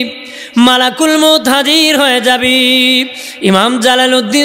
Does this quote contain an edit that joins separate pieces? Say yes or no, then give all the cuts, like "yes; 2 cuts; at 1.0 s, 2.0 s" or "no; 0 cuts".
no; 0 cuts